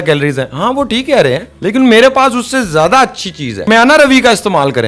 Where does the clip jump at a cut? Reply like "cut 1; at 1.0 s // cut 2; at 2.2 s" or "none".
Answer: none

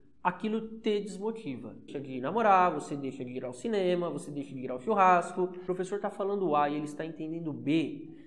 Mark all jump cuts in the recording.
cut 1; at 2.0 s // cut 2; at 5.6 s

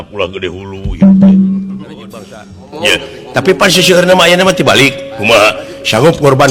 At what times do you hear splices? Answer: cut 1; at 2.6 s

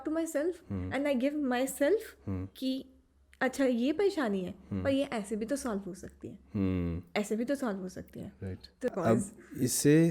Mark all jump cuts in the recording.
cut 1; at 8.9 s

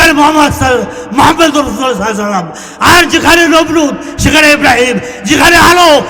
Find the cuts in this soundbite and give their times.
none

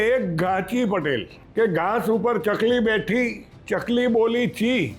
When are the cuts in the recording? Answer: cut 1; at 1.4 s

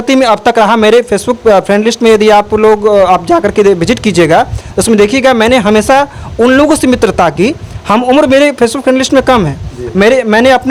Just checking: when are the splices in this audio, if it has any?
none

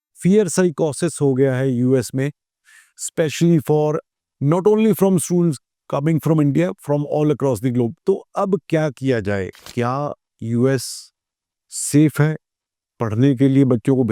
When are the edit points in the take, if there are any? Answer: cut 1; at 9.6 s

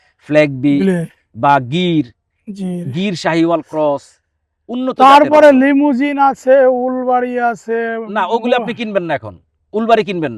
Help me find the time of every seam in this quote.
none

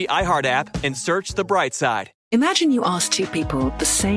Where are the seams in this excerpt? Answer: cut 1; at 2.1 s

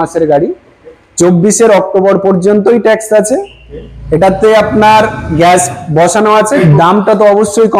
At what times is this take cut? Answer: cut 1; at 6.6 s

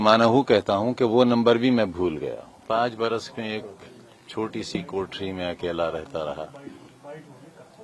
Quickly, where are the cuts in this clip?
cut 1; at 2.6 s

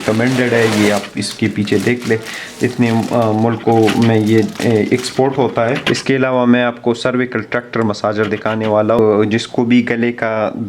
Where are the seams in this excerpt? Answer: cut 1; at 5.8 s // cut 2; at 9.0 s

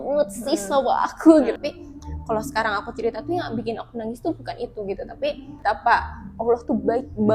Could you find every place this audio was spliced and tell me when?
cut 1; at 1.5 s // cut 2; at 5.6 s

